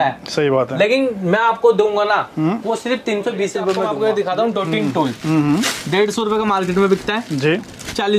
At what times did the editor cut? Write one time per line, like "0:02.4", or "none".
0:03.9